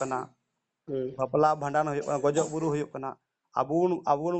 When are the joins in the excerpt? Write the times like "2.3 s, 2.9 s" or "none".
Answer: none